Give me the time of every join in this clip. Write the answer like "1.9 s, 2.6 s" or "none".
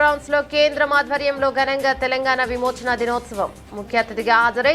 none